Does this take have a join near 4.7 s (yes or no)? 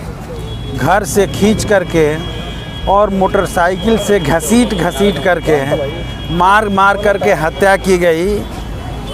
no